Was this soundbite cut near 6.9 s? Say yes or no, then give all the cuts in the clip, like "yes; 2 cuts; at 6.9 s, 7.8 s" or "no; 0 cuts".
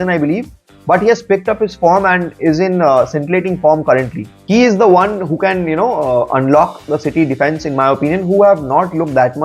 no; 1 cut; at 4.5 s